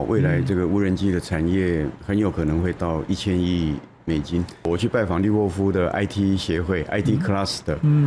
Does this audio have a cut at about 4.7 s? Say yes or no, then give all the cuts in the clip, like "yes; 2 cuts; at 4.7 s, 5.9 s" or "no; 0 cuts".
yes; 1 cut; at 4.7 s